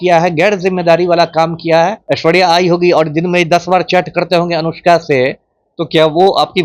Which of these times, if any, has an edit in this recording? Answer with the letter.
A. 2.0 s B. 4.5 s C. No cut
A